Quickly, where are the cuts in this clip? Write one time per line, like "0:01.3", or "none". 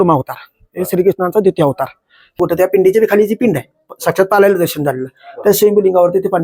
0:02.4